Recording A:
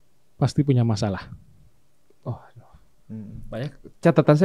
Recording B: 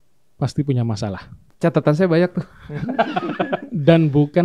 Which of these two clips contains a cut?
B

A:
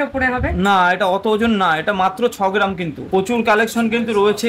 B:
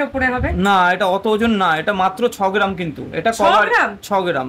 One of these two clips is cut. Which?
A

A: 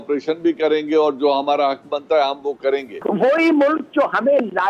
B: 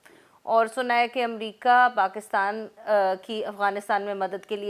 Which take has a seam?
A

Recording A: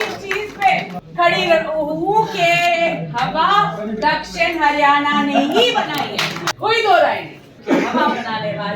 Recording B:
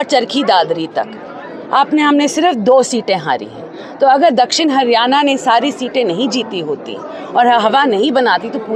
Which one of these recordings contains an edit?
A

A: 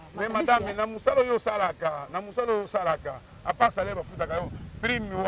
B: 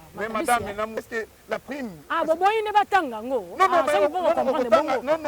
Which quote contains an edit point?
B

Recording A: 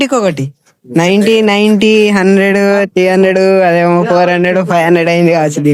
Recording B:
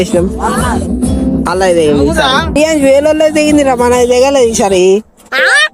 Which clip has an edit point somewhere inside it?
B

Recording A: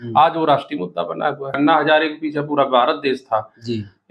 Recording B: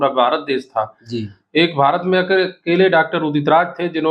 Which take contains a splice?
A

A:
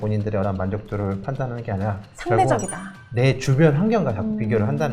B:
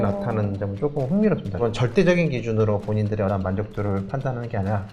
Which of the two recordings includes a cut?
B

